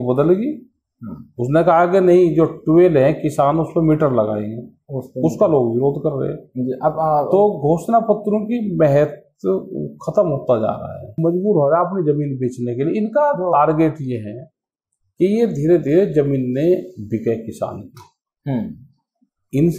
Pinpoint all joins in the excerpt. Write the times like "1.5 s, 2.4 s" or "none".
11.2 s

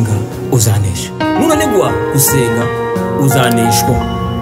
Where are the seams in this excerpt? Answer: none

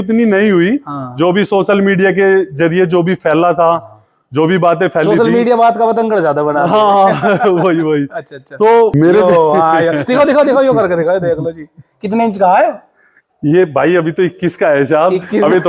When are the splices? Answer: 8.9 s

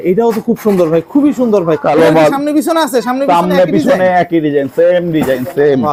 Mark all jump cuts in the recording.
none

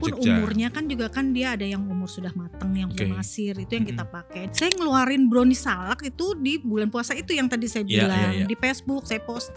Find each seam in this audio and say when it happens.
4.4 s

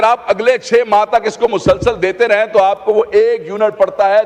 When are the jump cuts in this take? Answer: none

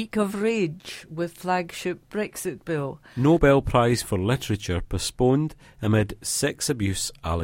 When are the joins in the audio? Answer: 3.0 s

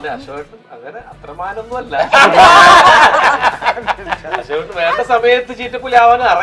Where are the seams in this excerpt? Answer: none

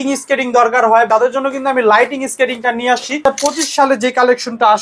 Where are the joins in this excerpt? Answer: 1.1 s, 3.3 s

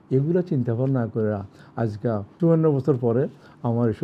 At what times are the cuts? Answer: 2.3 s

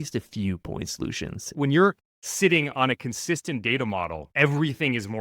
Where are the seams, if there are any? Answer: 1.5 s, 4.2 s

